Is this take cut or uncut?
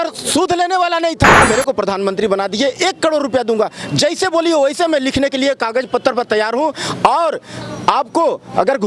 cut